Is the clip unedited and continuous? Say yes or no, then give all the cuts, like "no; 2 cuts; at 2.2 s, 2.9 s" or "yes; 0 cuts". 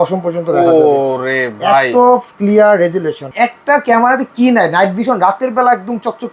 no; 1 cut; at 3.2 s